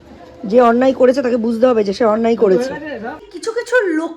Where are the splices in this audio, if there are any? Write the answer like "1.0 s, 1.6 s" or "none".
3.2 s